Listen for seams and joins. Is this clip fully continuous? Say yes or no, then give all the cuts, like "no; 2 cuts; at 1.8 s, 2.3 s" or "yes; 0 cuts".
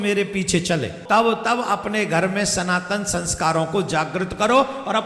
no; 1 cut; at 1.0 s